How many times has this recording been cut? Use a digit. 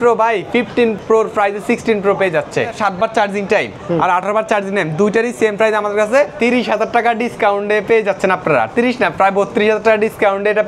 3